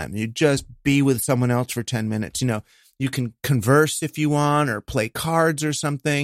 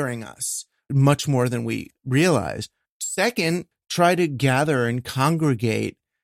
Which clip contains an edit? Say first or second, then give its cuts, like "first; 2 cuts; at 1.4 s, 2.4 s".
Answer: second; 4 cuts; at 0.9 s, 1.9 s, 2.9 s, 3.7 s